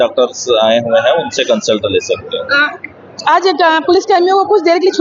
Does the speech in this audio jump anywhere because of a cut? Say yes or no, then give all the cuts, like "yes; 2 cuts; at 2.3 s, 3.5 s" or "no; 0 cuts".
no; 0 cuts